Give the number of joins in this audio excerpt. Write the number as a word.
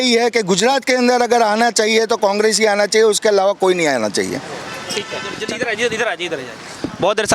zero